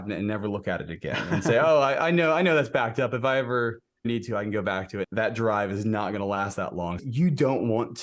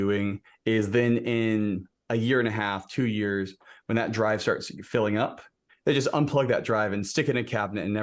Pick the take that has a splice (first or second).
first